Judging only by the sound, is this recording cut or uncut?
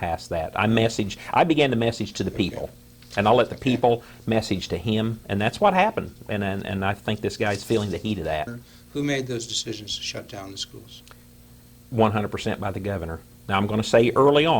cut